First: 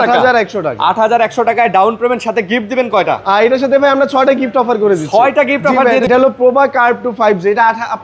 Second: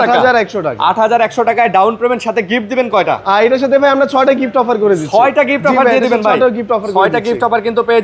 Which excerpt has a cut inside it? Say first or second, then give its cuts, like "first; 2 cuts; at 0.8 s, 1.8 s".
first; 1 cut; at 6.1 s